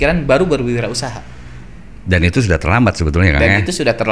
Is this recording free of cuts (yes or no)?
yes